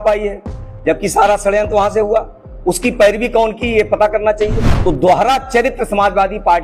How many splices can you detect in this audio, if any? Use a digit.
1